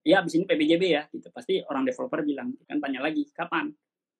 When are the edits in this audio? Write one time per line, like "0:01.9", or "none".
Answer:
0:02.6